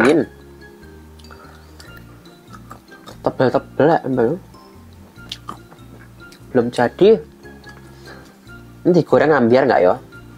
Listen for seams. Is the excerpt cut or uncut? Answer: uncut